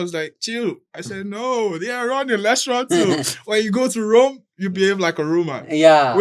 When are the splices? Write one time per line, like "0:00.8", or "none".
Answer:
none